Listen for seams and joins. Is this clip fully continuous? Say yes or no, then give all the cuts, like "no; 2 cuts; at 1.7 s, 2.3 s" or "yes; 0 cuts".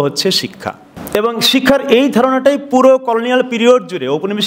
no; 1 cut; at 0.9 s